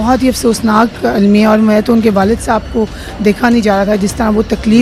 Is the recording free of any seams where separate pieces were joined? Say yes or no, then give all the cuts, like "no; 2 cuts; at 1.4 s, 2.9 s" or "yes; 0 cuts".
yes; 0 cuts